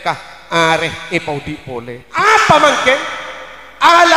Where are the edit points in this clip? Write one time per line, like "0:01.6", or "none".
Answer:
0:02.0